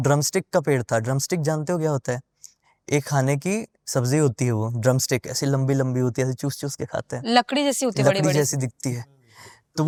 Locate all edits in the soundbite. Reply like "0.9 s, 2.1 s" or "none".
none